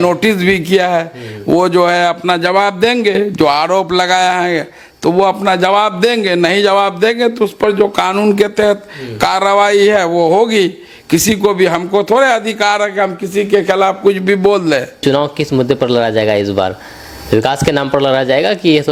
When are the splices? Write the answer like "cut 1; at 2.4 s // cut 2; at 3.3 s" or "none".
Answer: none